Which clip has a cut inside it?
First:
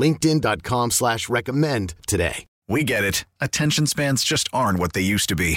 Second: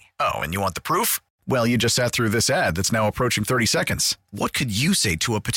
first; 1 cut; at 2.4 s

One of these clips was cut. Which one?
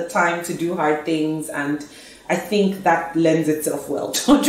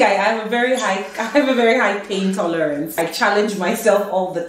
second; 1 cut; at 3.0 s

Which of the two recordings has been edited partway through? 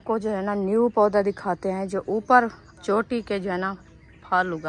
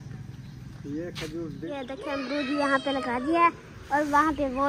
second; 1 cut; at 1.7 s

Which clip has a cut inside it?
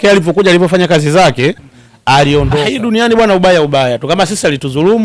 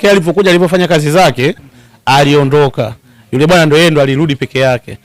first; 1 cut; at 2.7 s

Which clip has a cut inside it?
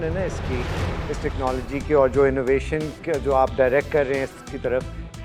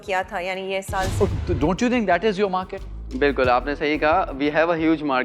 second; 1 cut; at 1.3 s

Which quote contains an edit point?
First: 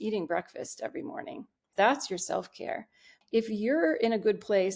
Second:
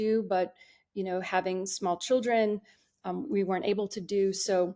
first; 2 cuts; at 1.6 s, 3.1 s

